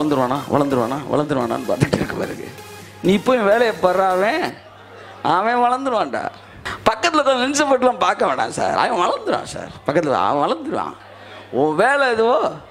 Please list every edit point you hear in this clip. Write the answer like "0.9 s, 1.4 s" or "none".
6.6 s